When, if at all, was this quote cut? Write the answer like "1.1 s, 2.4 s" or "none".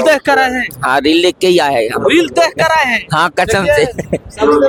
none